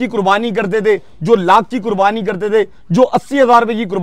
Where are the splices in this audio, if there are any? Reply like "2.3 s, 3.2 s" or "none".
none